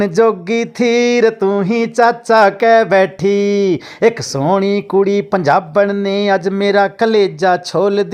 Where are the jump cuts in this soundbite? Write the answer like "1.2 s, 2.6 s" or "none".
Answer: none